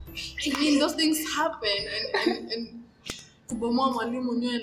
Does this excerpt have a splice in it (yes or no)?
no